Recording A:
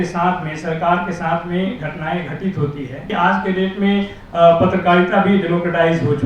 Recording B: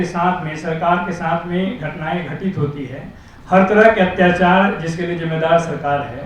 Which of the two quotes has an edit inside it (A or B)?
A